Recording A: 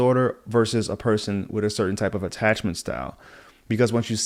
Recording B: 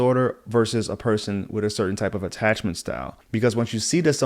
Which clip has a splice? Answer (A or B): B